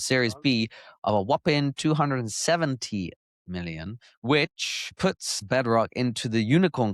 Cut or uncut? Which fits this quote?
cut